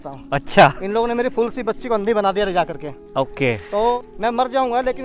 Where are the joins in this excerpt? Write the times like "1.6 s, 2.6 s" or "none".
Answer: 4.0 s

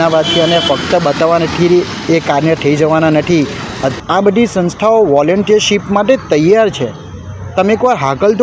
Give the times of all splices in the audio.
4.0 s

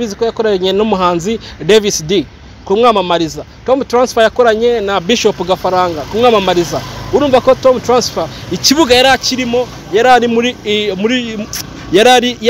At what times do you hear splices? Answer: none

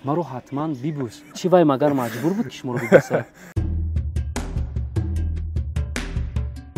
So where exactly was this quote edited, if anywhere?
1.2 s

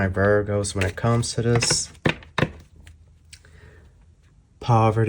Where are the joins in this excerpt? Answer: none

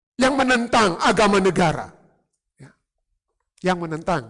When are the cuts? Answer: none

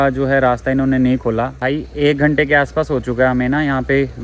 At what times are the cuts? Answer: 1.5 s

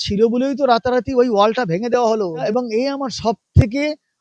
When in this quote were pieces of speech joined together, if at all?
2.4 s

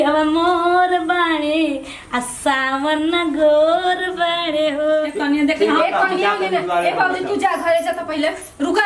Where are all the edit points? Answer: 5.1 s

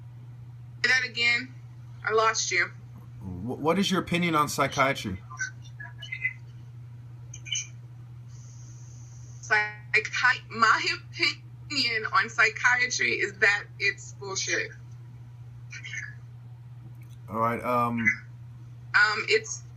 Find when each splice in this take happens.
14.9 s

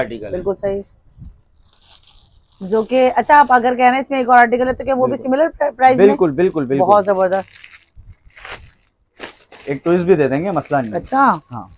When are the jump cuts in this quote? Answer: none

